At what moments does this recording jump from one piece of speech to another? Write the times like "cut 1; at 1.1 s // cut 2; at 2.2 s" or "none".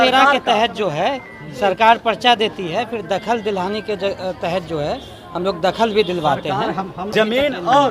cut 1; at 7.0 s